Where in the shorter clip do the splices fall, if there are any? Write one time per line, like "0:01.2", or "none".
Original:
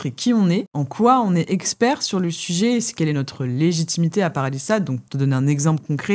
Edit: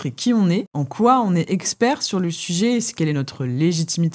none